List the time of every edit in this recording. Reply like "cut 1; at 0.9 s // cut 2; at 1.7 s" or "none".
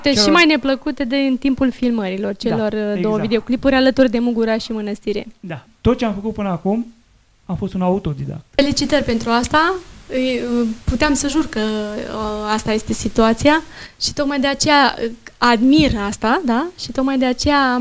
cut 1; at 5.7 s